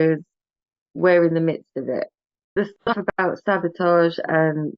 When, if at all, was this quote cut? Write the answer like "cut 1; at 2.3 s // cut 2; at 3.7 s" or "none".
cut 1; at 2.8 s